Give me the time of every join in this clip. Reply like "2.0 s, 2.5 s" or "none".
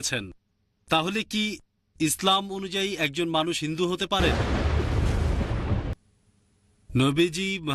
4.3 s, 5.9 s

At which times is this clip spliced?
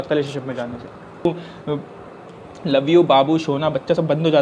1.3 s

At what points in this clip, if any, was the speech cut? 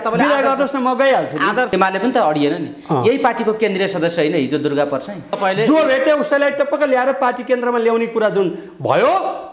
1.7 s, 5.4 s

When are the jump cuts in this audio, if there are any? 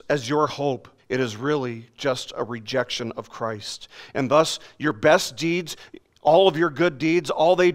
0.9 s

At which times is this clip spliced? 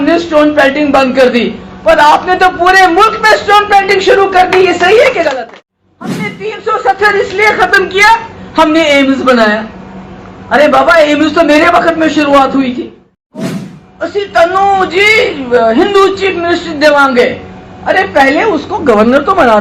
5.2 s, 13.5 s

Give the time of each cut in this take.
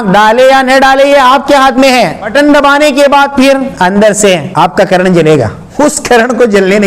2.3 s, 3.7 s, 4.5 s, 5.6 s

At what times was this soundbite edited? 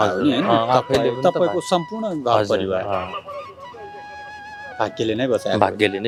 none

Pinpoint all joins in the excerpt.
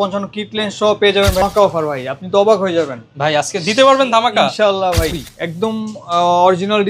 1.4 s, 5.2 s

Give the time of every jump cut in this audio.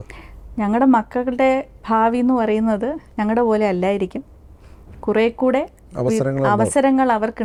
none

